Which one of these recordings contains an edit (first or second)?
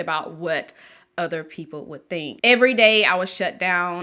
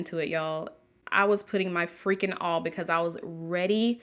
first